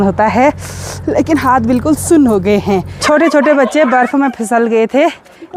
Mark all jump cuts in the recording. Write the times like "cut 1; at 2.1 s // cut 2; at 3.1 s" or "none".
cut 1; at 2.9 s